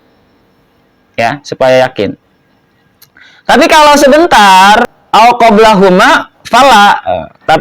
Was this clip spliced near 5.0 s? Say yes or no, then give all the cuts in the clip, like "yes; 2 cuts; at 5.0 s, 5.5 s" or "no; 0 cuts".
yes; 1 cut; at 5.0 s